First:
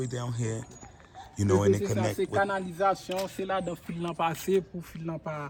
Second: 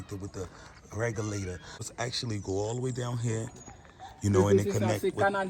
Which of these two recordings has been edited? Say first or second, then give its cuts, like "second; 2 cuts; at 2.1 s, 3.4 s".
second; 1 cut; at 1.9 s